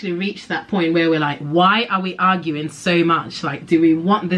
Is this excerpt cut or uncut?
uncut